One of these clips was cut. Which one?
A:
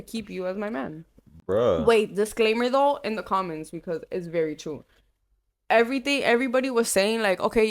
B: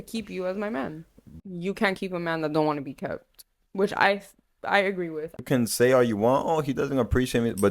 B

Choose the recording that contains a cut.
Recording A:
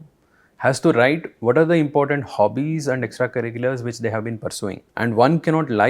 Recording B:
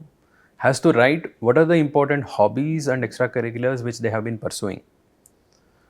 A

